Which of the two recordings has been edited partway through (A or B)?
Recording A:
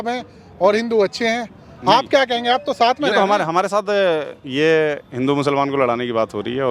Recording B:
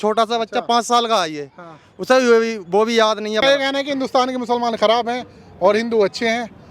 B